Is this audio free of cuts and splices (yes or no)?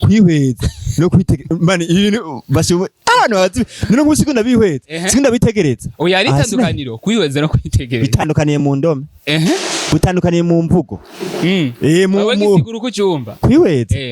yes